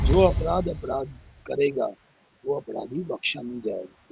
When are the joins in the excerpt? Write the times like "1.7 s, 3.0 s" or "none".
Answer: none